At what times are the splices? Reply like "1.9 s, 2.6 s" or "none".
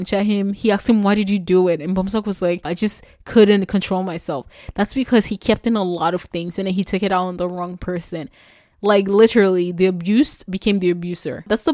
2.7 s